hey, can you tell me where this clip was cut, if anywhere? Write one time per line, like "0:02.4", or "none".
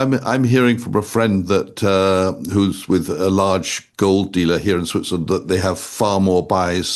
none